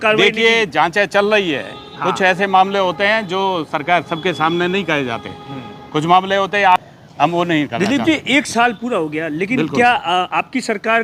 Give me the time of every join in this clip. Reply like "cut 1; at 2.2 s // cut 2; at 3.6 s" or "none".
cut 1; at 6.8 s

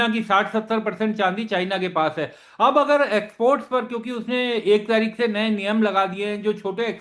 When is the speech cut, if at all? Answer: none

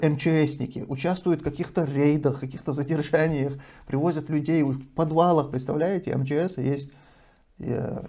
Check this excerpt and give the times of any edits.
none

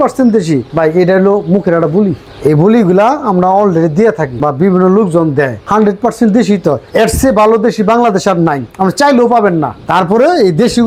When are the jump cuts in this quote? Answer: none

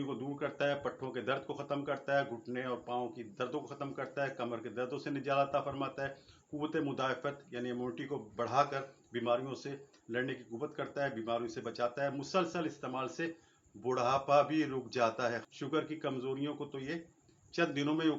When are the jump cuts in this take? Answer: cut 1; at 15.4 s

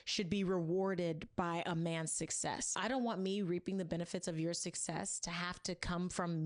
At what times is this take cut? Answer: cut 1; at 3.1 s

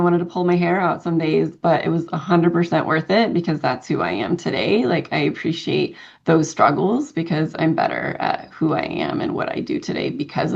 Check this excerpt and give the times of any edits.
none

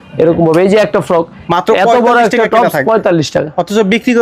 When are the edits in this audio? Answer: cut 1; at 1.4 s

